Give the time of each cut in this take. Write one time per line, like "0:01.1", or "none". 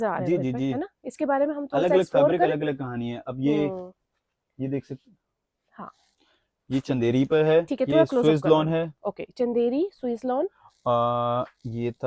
none